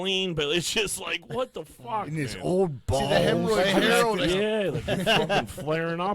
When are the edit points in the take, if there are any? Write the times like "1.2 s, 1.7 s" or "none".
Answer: 4.2 s

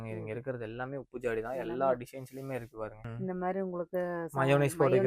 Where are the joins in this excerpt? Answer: 3.1 s

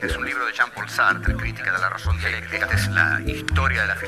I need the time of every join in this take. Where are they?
1.6 s

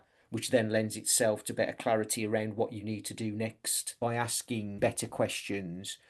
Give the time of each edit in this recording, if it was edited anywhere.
3.8 s, 4.8 s

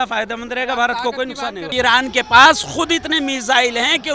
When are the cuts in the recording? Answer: 1.6 s

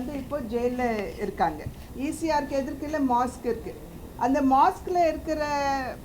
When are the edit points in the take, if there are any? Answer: 1.8 s

